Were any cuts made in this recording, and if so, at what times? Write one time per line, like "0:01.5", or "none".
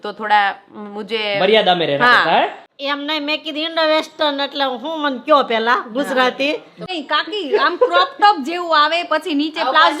0:02.6
0:06.8